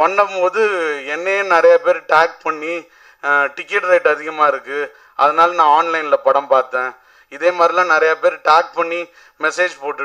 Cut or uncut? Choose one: uncut